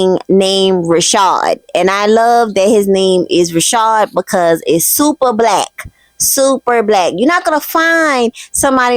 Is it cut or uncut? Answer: uncut